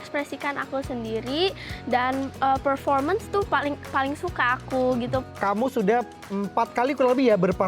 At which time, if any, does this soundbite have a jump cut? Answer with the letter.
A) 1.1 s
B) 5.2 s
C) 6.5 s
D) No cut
B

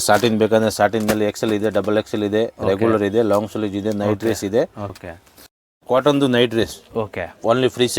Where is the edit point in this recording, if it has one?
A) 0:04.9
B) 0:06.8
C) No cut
A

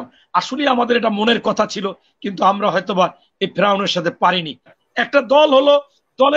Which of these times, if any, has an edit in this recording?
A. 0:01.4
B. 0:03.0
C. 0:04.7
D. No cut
C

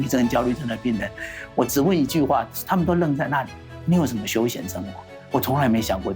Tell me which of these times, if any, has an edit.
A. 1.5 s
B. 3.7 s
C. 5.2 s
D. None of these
C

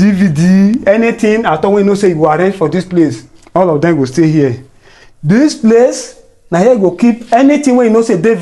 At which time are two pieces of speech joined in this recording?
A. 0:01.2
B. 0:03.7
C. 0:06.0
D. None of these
D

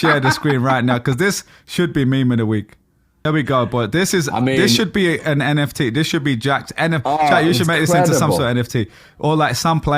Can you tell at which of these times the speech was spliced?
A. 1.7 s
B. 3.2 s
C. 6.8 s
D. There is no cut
B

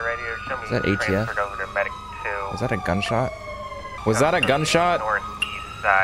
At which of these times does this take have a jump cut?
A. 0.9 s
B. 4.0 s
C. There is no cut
B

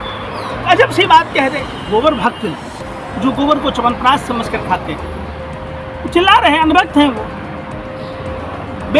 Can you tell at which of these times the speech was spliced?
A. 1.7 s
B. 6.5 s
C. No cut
A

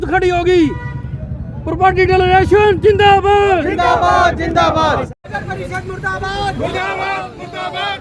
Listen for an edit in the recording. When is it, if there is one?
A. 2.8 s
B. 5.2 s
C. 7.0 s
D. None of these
B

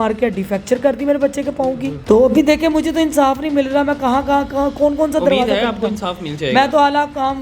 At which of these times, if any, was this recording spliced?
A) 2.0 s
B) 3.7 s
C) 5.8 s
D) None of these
A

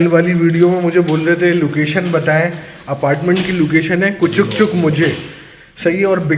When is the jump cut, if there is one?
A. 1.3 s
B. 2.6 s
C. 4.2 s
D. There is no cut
D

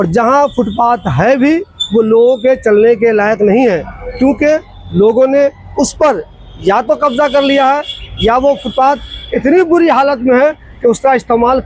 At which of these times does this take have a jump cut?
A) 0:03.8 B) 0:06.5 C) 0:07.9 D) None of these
D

